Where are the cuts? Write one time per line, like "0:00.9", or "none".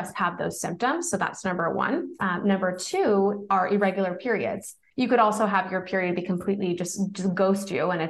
0:02.1
0:04.8